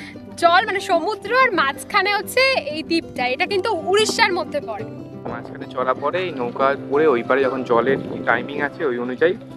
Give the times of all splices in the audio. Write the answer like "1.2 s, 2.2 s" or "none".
5.3 s